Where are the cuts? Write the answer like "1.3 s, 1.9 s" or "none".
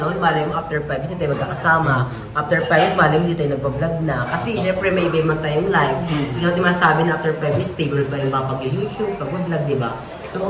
none